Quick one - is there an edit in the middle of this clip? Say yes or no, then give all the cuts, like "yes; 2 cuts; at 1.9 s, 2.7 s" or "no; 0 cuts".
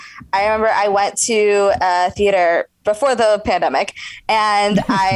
yes; 1 cut; at 2.7 s